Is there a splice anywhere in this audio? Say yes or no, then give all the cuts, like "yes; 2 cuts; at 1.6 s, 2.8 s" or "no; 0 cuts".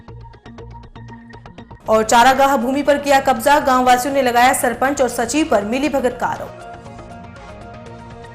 yes; 1 cut; at 1.1 s